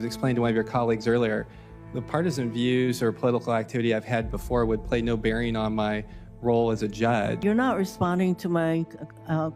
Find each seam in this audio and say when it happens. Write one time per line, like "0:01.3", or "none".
0:07.4